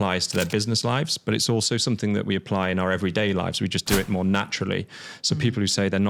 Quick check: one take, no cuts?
yes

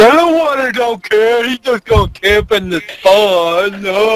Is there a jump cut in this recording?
no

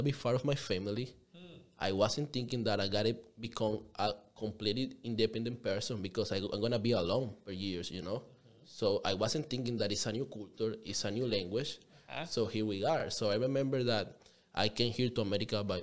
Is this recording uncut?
yes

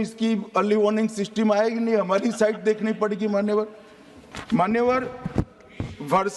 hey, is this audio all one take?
yes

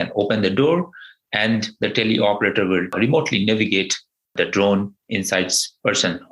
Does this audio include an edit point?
yes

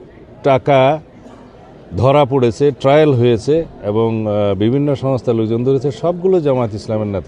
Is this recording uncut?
yes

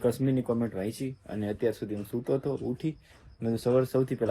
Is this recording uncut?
yes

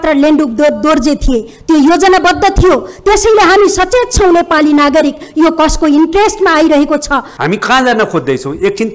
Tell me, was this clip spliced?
yes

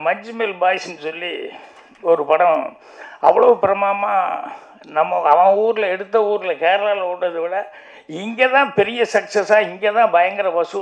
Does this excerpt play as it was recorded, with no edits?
yes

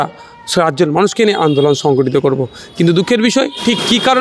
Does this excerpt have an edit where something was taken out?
no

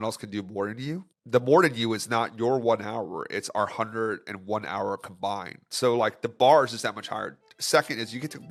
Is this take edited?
no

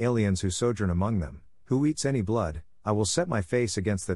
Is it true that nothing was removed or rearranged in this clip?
no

